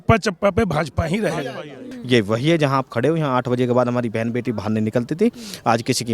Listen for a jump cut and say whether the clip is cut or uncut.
cut